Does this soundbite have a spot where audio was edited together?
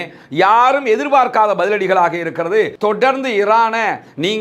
yes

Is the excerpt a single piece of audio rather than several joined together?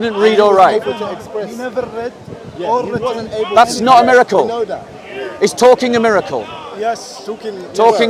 yes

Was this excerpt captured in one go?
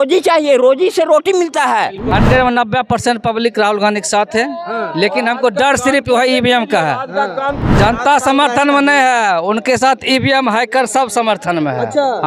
no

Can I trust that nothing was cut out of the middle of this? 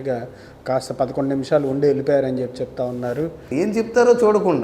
no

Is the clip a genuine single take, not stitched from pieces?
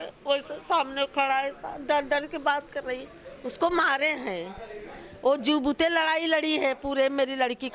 yes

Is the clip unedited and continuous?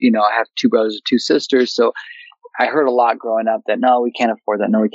yes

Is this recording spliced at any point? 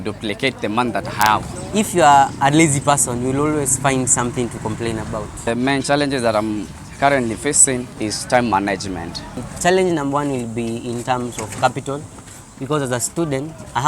yes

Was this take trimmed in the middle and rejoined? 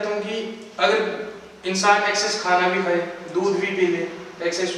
no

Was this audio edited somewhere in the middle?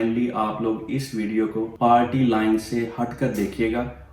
yes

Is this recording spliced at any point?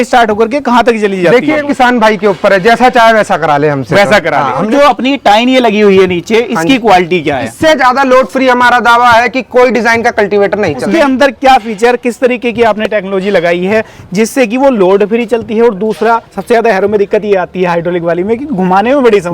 yes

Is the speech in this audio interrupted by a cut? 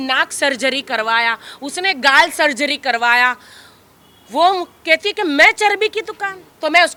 no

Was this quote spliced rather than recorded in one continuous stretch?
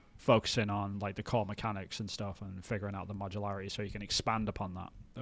no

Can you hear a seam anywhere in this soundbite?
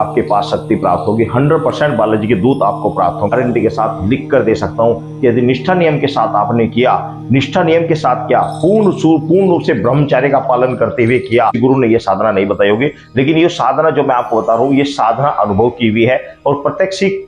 yes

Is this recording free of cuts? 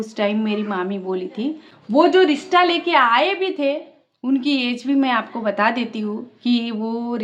no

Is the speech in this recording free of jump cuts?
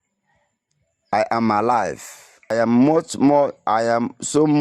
no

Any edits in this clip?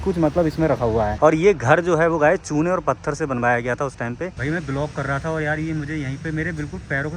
yes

